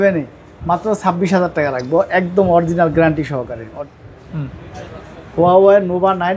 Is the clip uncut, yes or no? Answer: no